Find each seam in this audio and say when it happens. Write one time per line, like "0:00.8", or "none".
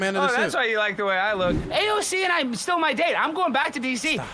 0:01.6